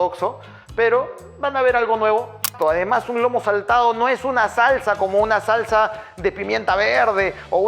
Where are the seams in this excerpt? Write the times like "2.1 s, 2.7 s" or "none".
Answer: 2.5 s